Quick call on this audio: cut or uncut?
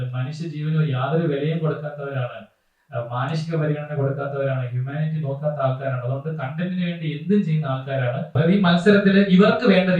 cut